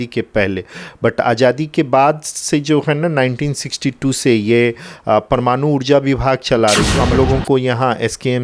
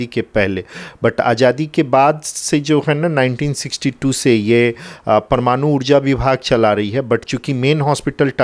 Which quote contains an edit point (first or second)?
first